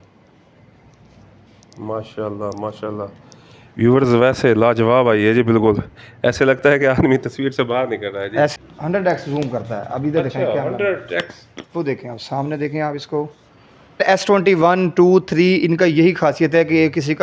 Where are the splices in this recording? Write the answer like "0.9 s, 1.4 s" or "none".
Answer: 8.5 s, 14.0 s